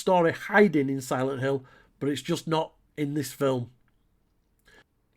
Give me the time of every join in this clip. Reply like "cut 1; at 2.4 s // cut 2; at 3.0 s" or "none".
none